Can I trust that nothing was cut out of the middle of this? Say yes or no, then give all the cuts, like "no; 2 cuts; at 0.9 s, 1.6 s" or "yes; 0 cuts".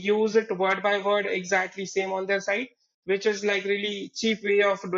yes; 0 cuts